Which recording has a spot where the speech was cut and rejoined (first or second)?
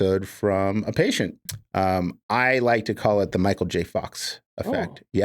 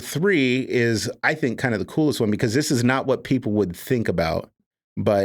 first